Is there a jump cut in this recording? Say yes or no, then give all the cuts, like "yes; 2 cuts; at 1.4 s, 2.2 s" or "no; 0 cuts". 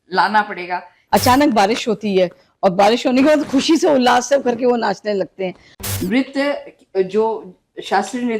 yes; 2 cuts; at 0.9 s, 5.7 s